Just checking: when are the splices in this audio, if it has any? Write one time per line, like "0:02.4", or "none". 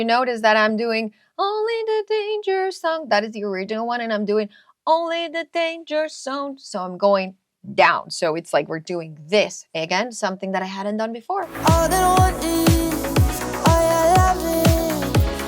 0:11.5